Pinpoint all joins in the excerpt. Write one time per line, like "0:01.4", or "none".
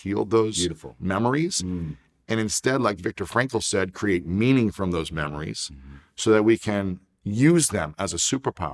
none